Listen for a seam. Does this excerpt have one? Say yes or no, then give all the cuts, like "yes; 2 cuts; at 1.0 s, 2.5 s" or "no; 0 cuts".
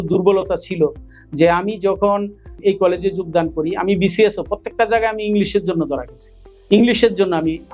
no; 0 cuts